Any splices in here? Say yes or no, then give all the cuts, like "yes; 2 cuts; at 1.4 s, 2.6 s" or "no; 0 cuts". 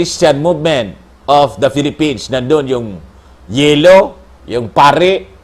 no; 0 cuts